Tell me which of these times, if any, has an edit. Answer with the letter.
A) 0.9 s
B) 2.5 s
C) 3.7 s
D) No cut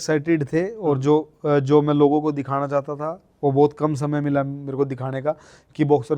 D